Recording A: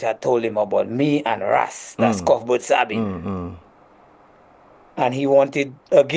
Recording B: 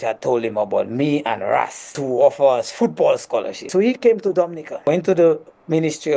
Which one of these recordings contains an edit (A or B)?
B